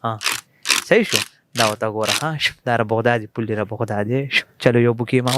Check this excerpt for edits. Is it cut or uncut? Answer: uncut